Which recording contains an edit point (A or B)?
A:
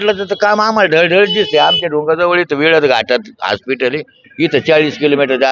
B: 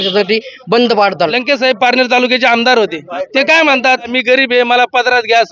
B